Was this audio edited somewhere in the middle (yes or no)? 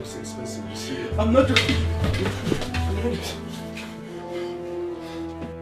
no